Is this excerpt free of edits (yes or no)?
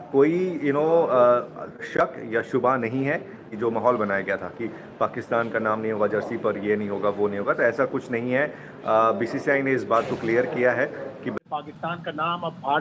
no